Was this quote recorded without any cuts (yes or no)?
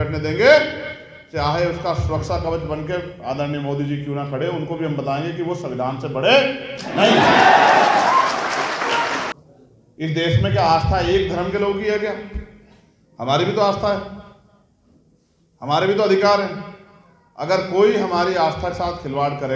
no